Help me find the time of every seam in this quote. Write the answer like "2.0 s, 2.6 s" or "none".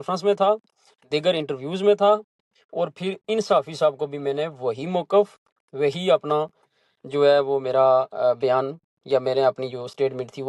none

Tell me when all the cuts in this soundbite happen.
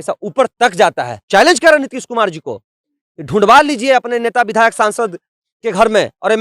1.2 s

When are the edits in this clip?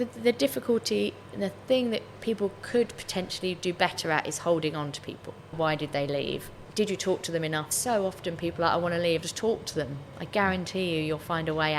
5.6 s, 6.6 s, 7.7 s, 9.2 s

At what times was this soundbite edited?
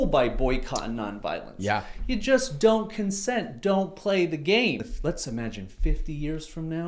4.9 s

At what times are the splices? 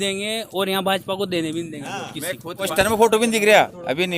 2.7 s

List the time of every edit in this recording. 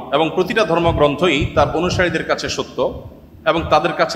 none

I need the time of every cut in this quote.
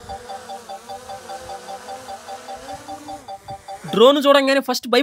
none

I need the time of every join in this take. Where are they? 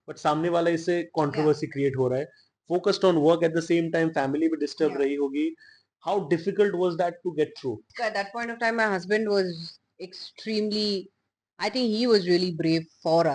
7.9 s

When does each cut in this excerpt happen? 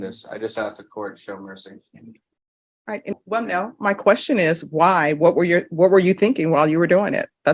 3.1 s

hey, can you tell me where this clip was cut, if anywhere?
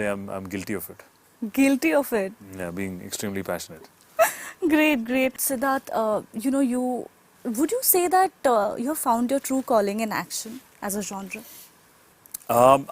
none

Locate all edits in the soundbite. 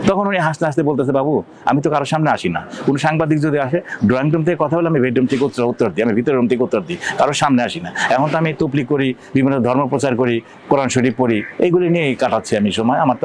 none

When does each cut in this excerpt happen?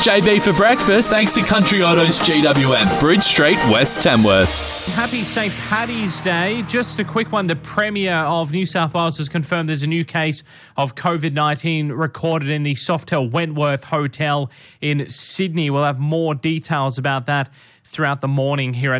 4.8 s

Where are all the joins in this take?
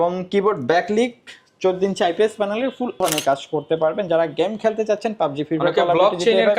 3.0 s

